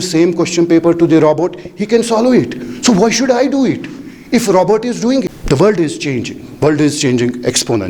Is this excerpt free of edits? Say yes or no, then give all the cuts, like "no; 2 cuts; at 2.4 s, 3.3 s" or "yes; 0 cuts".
no; 1 cut; at 5.3 s